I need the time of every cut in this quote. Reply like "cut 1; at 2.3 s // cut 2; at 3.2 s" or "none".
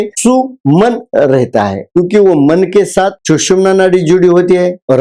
cut 1; at 1.9 s